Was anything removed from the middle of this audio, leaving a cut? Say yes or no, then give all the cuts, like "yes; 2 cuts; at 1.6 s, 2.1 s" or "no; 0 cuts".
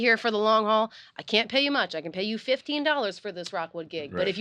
no; 0 cuts